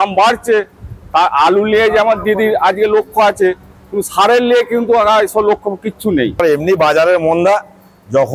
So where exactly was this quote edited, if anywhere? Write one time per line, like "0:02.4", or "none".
0:06.4